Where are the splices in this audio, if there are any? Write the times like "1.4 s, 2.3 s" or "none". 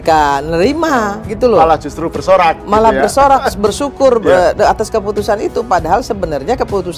none